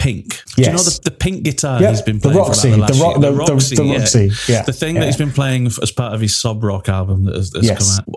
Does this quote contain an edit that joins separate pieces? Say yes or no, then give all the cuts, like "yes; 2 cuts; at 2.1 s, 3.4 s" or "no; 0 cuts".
no; 0 cuts